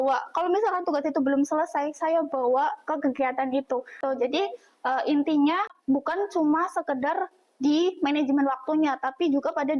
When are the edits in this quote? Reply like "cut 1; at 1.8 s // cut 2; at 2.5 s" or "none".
cut 1; at 4.0 s // cut 2; at 5.8 s